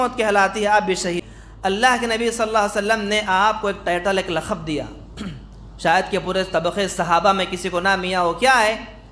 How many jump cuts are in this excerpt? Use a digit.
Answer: 1